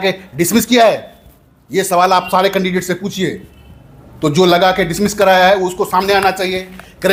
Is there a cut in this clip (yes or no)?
no